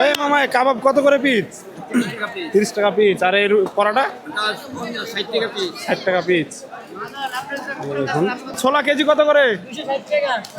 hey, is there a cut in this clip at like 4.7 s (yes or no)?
no